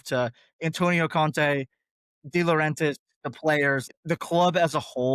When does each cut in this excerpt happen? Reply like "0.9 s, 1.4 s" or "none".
3.9 s